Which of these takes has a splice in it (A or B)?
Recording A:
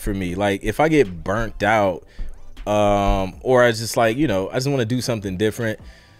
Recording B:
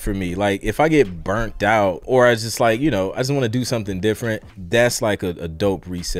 B